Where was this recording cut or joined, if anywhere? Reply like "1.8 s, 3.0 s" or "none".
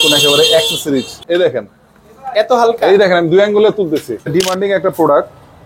1.2 s, 4.3 s

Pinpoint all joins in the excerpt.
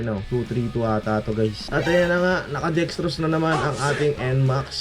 1.6 s

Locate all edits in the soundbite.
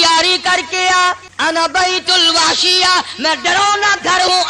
1.3 s

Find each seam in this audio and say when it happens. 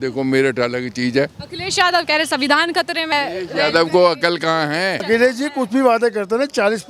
3.1 s, 5.0 s

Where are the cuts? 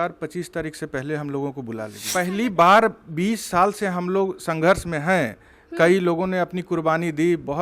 2.0 s

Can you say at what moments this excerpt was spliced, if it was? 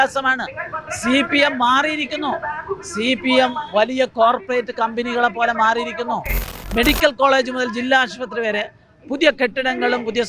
6.5 s

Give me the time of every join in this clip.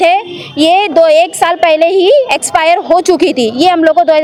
none

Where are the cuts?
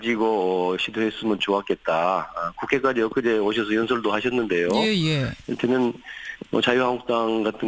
4.0 s

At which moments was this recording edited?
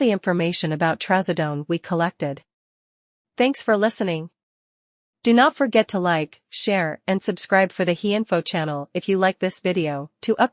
1.0 s

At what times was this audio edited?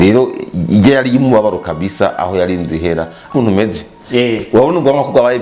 3.3 s

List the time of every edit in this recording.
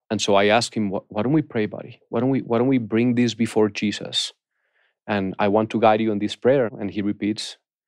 6.7 s

